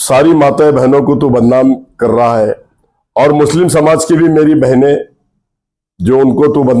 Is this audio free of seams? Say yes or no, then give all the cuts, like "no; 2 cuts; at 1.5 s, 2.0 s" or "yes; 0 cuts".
yes; 0 cuts